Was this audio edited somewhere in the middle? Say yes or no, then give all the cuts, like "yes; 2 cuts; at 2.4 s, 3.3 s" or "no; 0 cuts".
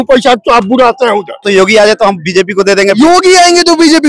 yes; 1 cut; at 1.4 s